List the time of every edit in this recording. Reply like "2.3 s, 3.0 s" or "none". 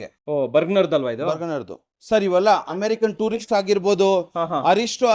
1.8 s